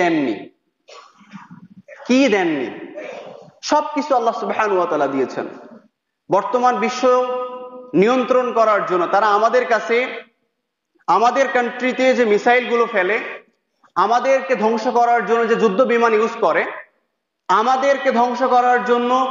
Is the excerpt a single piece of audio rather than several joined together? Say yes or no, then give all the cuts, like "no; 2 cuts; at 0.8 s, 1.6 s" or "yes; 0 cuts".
yes; 0 cuts